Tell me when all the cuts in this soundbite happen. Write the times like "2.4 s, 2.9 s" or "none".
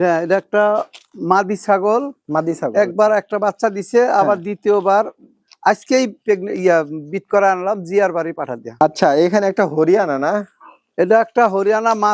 8.7 s

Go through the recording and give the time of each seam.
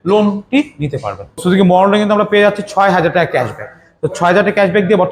1.4 s

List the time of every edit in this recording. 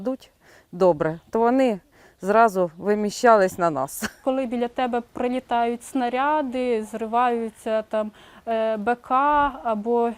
4.2 s

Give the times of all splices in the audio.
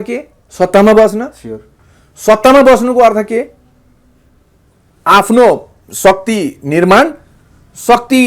none

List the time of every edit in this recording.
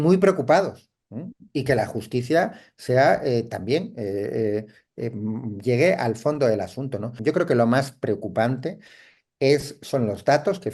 7.0 s

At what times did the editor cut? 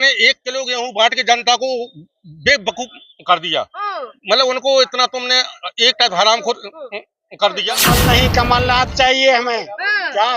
7.7 s

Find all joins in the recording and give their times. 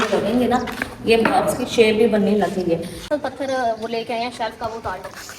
3.1 s

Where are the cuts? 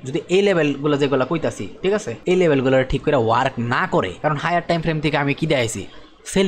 2.1 s, 4.1 s

